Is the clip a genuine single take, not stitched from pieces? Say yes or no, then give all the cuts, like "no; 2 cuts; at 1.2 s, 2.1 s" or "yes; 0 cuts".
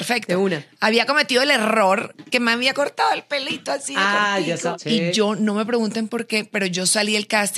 no; 1 cut; at 4.7 s